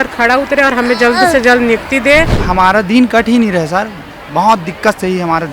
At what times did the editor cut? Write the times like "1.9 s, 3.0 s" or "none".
2.4 s

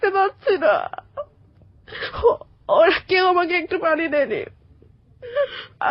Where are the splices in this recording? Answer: none

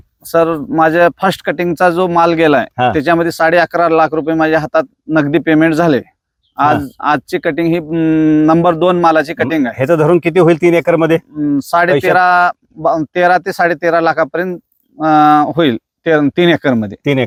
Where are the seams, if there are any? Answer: none

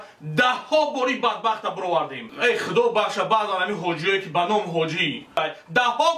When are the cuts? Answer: 2.3 s, 5.3 s

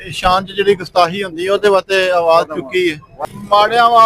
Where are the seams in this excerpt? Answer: 3.1 s

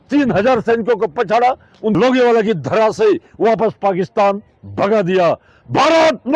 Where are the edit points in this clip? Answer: 1.9 s

